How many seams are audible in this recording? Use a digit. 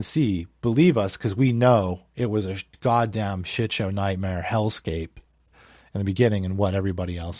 0